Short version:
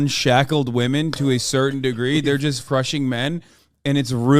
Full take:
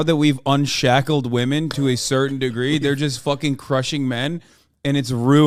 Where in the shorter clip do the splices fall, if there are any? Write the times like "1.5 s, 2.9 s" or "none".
2.6 s